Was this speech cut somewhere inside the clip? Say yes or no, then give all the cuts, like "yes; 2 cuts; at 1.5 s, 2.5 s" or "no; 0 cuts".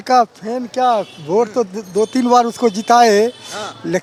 no; 0 cuts